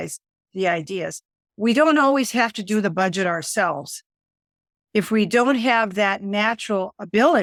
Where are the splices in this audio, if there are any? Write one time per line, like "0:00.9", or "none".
none